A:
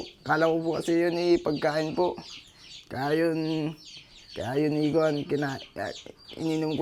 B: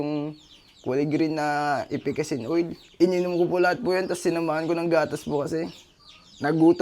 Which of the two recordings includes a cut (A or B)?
B